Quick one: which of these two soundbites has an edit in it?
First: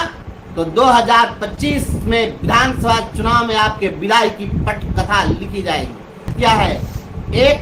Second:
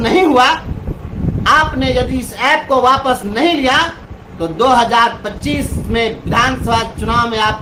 first; 1 cut; at 6.3 s

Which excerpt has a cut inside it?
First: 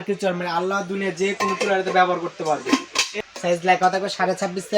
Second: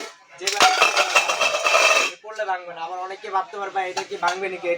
first; 1 cut; at 3.1 s

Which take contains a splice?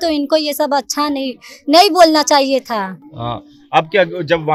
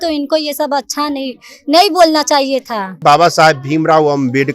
second; 1 cut; at 3.0 s

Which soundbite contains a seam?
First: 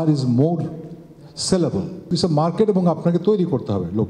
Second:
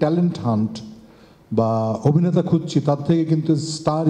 first; 1 cut; at 2.1 s

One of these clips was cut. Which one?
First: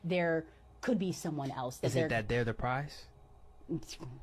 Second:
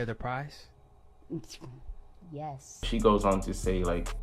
second; 1 cut; at 2.9 s

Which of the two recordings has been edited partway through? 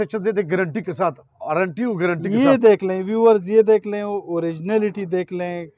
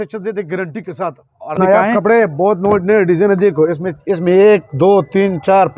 second; 1 cut; at 1.6 s

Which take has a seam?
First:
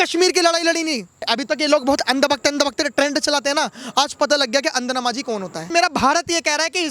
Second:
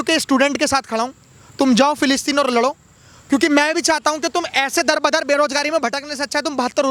first; 2 cuts; at 1.3 s, 5.7 s

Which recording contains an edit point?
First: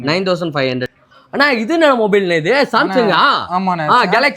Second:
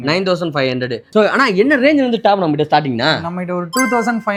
first; 1 cut; at 0.9 s

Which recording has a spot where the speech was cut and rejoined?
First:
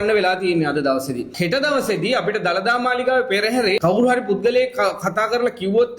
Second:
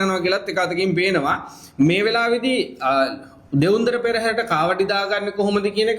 first; 2 cuts; at 1.3 s, 3.8 s

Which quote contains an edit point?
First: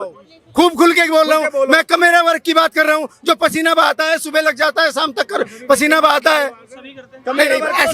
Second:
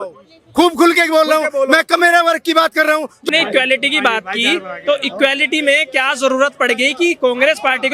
second; 1 cut; at 3.3 s

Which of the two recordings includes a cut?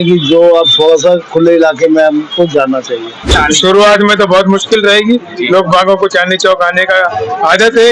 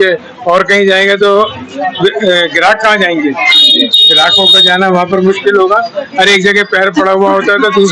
first; 1 cut; at 3.3 s

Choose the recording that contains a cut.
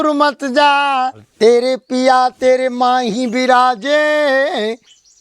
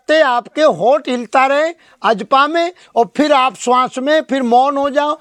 first; 1 cut; at 1.2 s

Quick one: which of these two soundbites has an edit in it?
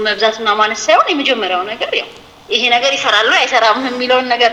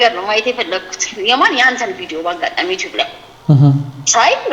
second; 1 cut; at 1.1 s

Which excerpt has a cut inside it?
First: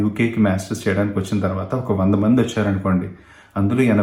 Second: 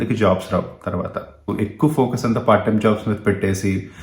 second; 1 cut; at 1.5 s

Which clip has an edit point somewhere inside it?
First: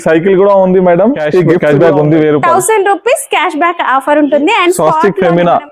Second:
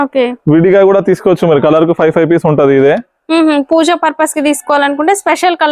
first; 2 cuts; at 1.5 s, 4.8 s

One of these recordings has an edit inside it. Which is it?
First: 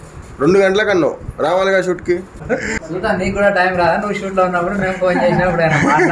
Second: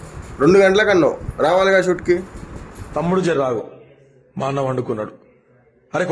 first; 1 cut; at 2.4 s

